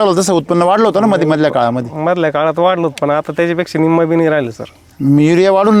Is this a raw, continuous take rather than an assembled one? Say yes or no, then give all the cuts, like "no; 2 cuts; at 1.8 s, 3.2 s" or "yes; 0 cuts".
yes; 0 cuts